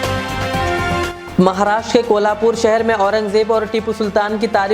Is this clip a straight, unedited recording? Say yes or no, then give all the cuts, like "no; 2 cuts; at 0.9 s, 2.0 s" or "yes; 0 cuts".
yes; 0 cuts